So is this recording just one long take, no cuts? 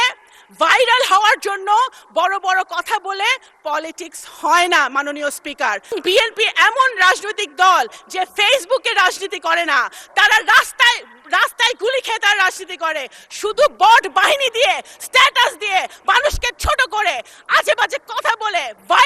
no; 1 cut; at 5.9 s

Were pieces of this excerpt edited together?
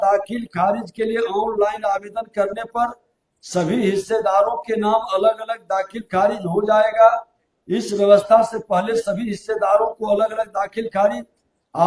no; 0 cuts

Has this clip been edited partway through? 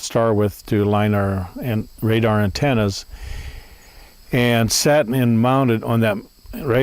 no; 0 cuts

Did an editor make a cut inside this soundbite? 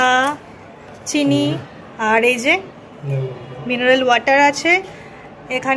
no; 0 cuts

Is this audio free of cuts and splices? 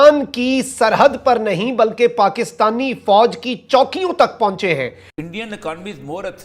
no; 1 cut; at 5.0 s

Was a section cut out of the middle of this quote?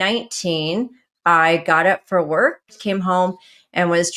yes; 1 cut; at 2.8 s

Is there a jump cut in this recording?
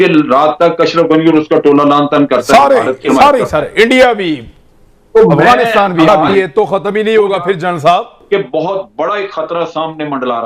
yes; 2 cuts; at 6.3 s, 8.1 s

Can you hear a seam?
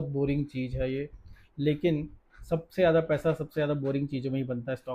no; 0 cuts

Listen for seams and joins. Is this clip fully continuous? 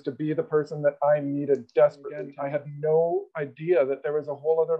no; 1 cut; at 2.3 s

